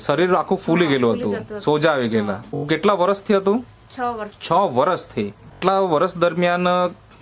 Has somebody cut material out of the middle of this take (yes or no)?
yes